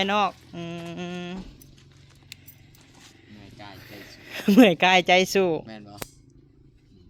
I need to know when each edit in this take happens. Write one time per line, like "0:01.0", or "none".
none